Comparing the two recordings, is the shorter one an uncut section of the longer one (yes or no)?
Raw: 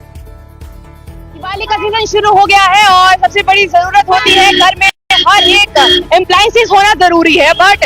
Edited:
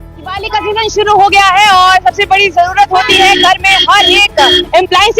no